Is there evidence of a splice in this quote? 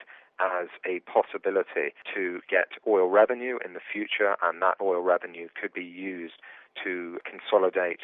no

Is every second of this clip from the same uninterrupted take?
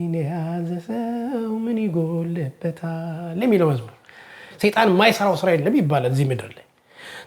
no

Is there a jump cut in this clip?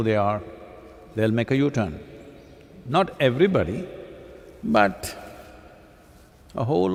no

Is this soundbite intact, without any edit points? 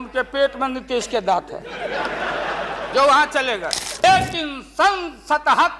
no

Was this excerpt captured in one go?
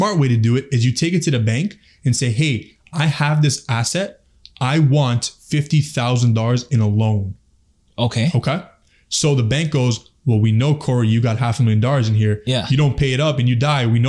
yes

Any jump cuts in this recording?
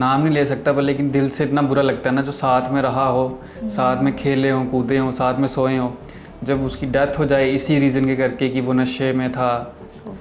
no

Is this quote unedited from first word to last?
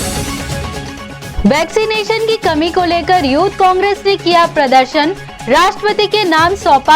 no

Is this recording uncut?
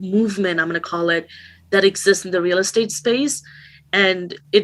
yes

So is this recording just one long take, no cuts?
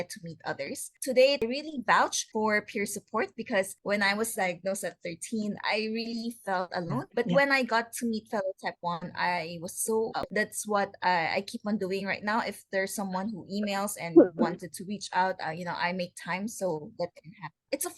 yes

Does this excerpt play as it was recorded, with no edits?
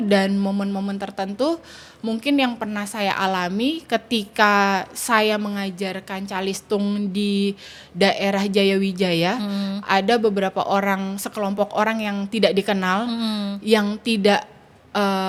yes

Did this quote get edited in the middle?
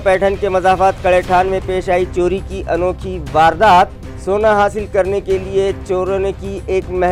no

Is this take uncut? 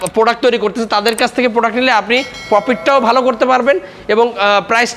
yes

